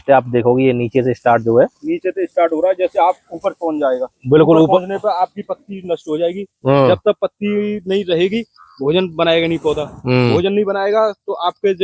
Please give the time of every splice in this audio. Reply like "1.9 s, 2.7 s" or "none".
none